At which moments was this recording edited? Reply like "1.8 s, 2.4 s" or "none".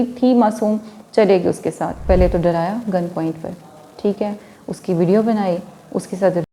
2.0 s